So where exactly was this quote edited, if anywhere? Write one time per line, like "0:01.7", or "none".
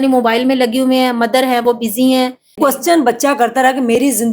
0:02.5